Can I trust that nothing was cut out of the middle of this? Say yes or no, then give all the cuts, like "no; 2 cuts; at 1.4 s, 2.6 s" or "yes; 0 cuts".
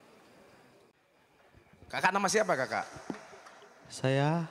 no; 1 cut; at 0.9 s